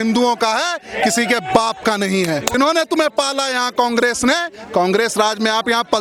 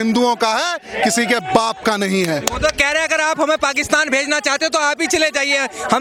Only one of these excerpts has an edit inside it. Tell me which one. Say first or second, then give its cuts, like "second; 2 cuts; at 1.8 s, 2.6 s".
first; 1 cut; at 2.5 s